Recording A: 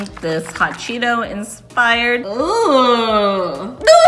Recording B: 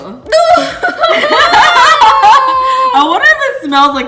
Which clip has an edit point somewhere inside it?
A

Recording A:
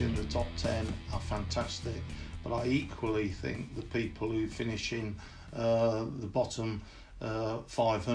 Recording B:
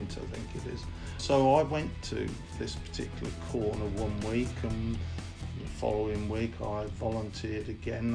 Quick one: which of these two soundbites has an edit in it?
B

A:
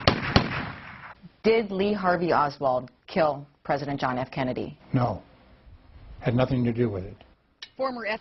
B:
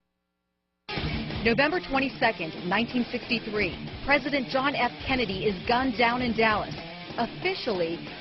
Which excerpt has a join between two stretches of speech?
B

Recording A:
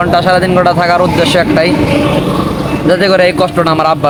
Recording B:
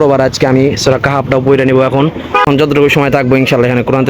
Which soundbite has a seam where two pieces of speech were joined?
B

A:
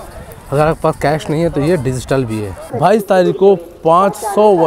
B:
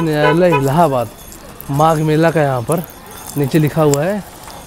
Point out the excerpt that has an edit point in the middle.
A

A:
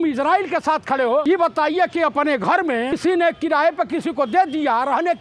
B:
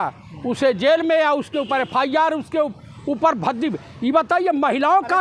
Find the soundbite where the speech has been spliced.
A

